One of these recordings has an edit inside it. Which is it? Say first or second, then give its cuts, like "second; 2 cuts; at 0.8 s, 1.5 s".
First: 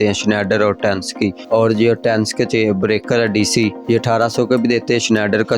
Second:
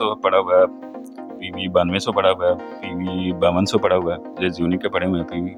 first; 2 cuts; at 1.4 s, 3.8 s